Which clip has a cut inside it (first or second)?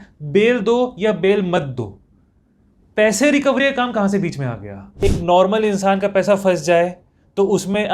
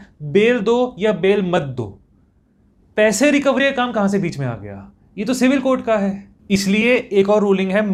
first